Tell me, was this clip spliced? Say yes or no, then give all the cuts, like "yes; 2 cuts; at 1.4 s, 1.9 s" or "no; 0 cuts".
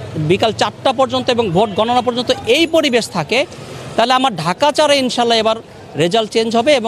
no; 0 cuts